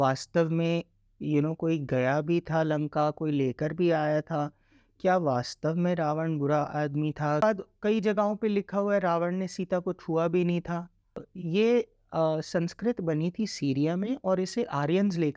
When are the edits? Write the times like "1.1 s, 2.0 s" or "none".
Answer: 7.4 s, 11.3 s